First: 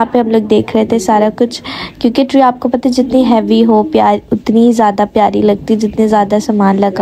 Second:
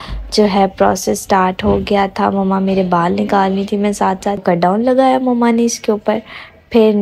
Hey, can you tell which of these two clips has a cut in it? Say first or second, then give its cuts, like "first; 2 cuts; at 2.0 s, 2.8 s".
second; 1 cut; at 4.4 s